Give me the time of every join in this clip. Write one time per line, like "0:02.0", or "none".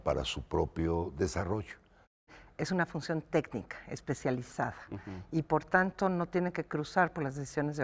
0:02.4